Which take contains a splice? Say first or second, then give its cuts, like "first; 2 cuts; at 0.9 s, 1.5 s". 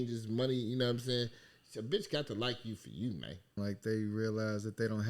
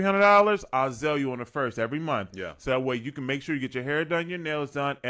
first; 1 cut; at 3.6 s